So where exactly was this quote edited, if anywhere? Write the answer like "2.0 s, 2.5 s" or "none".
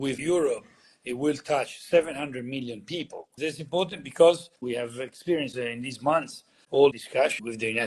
3.2 s, 4.6 s, 5.5 s, 7.0 s

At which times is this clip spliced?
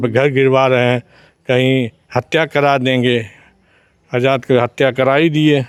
none

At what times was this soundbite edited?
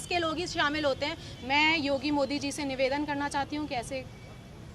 1.3 s

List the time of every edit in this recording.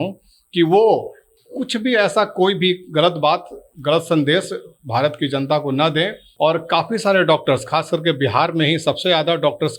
6.2 s

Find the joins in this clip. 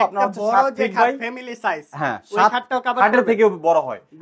none

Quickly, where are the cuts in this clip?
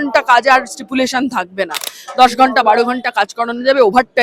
none

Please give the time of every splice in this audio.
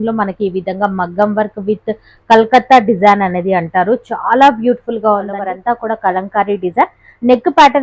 5.4 s

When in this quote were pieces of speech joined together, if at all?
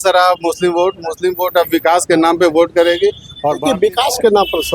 3.6 s

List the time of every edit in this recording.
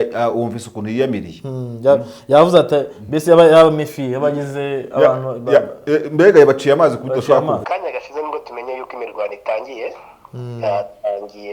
7.6 s

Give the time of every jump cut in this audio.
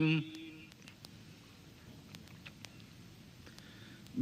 1.0 s

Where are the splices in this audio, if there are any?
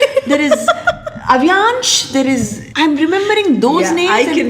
2.6 s

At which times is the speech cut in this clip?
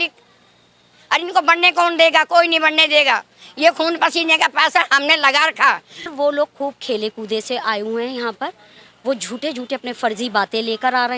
6.1 s

